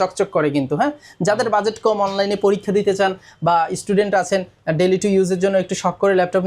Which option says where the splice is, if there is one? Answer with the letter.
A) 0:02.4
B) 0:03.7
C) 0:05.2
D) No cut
D